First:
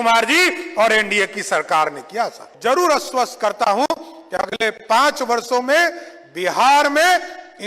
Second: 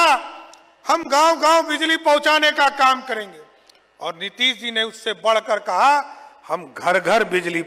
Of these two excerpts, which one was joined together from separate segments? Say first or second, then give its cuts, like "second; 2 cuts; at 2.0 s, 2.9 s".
first; 1 cut; at 2.4 s